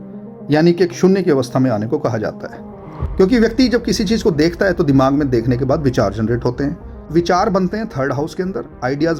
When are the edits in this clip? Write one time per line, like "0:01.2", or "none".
0:07.0